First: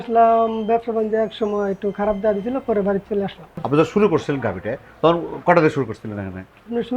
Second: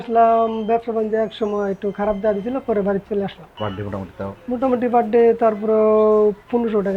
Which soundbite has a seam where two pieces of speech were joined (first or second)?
second